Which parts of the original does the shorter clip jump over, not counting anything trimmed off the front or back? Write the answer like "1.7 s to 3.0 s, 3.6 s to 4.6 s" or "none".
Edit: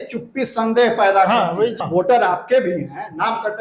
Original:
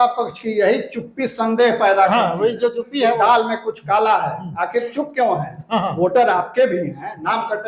2.6 s to 5.8 s